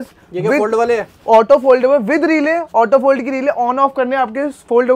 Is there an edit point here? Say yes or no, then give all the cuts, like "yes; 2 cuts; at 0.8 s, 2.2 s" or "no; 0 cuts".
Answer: no; 0 cuts